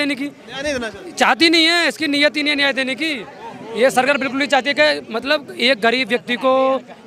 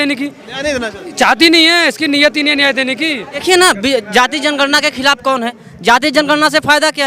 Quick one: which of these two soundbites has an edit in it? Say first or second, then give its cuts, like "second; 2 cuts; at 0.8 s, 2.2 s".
second; 1 cut; at 3.4 s